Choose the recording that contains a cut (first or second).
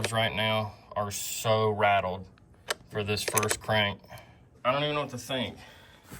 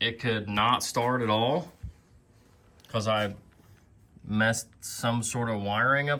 first